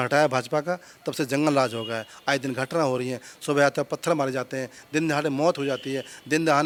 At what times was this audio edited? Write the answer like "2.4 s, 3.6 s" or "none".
none